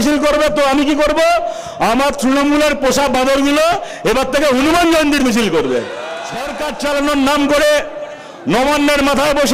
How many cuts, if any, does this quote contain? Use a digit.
1